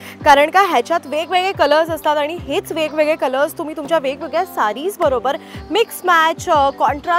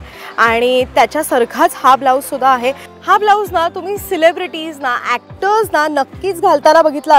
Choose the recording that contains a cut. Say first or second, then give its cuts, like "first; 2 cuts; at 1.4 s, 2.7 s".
second; 1 cut; at 2.9 s